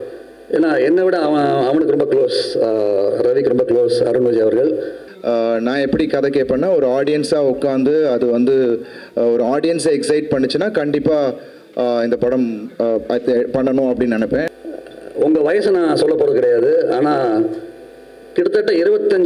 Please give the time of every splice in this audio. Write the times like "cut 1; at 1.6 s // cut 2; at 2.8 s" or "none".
cut 1; at 5.0 s // cut 2; at 14.5 s